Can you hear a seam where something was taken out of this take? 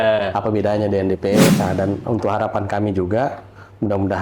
yes; 1 cut; at 1.5 s

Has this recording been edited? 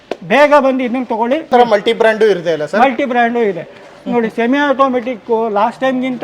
yes; 1 cut; at 1.5 s

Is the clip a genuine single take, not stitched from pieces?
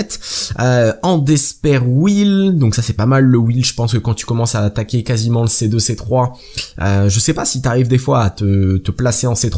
yes; 0 cuts

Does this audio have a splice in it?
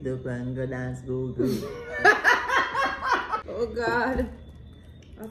yes; 1 cut; at 3.4 s

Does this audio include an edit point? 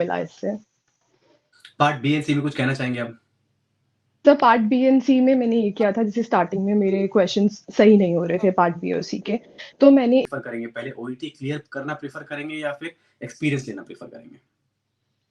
yes; 1 cut; at 10.2 s

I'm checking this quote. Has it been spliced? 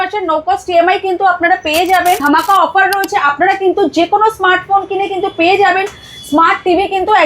yes; 1 cut; at 2.2 s

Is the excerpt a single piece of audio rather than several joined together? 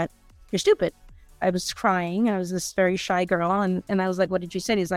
no; 1 cut; at 1.4 s

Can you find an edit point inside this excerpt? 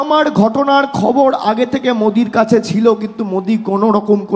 no; 0 cuts

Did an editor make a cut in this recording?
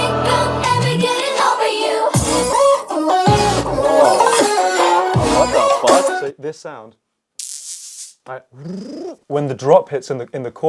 yes; 2 cuts; at 6.2 s, 9.2 s

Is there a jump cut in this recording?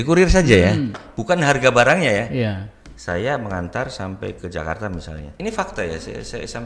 yes; 1 cut; at 5.2 s

